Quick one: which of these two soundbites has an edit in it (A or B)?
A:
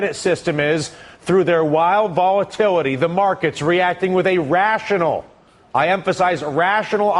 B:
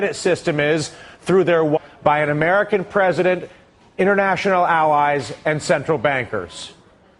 A